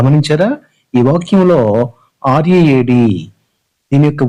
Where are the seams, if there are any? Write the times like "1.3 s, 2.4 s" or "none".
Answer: none